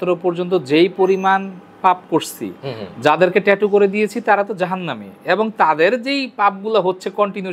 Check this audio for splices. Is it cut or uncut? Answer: uncut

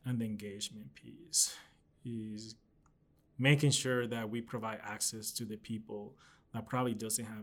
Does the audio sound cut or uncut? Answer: uncut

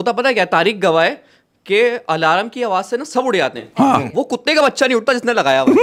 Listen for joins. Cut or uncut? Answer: uncut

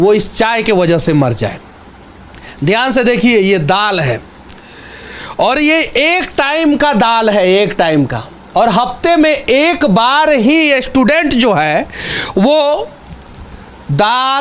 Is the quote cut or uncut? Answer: uncut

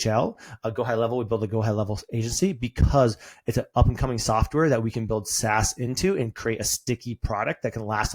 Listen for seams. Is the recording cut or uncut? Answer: uncut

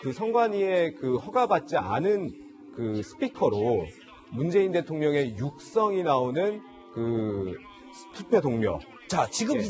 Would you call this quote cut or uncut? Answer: cut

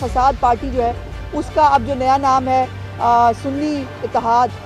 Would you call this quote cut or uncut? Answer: uncut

